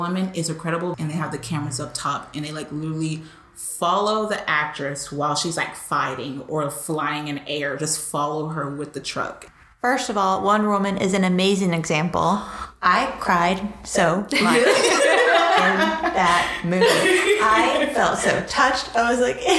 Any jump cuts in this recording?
yes; 2 cuts; at 0.9 s, 9.4 s

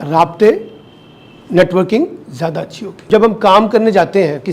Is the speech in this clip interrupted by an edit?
yes; 1 cut; at 3.1 s

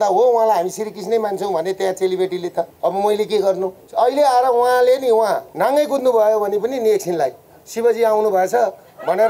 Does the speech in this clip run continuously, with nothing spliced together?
no; 3 cuts; at 2.7 s, 3.8 s, 5.5 s

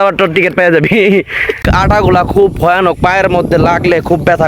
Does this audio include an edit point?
yes; 1 cut; at 1.7 s

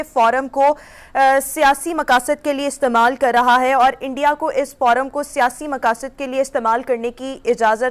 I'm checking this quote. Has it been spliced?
no; 0 cuts

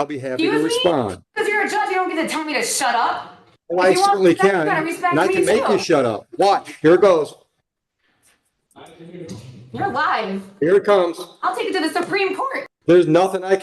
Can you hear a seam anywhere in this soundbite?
yes; 1 cut; at 12.6 s

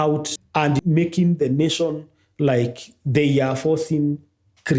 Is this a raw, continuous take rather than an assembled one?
yes; 0 cuts

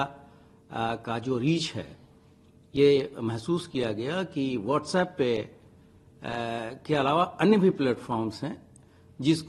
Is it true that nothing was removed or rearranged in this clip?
yes; 0 cuts

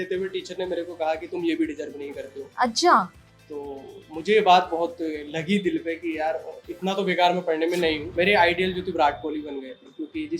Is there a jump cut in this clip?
yes; 1 cut; at 8.1 s

